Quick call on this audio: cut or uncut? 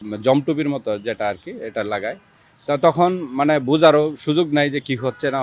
uncut